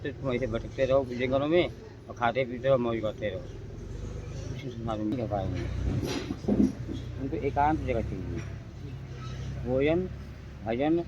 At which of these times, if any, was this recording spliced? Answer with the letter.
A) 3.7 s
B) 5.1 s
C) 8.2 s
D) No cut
B